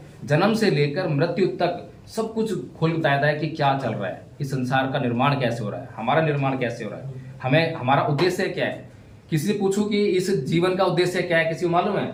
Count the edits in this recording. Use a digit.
0